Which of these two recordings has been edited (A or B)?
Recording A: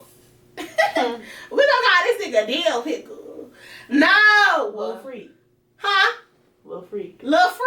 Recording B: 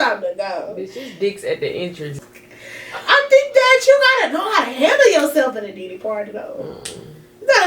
B